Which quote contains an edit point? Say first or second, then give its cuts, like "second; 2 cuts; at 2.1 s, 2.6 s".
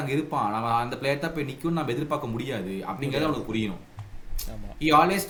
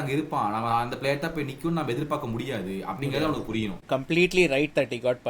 second; 1 cut; at 3.8 s